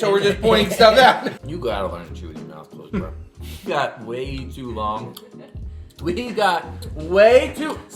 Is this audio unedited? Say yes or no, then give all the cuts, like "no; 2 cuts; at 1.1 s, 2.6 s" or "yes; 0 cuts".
no; 2 cuts; at 1.4 s, 3.7 s